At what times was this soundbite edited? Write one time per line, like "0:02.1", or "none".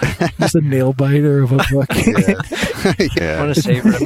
0:03.2